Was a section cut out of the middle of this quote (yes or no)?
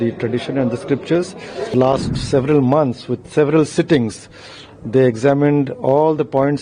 yes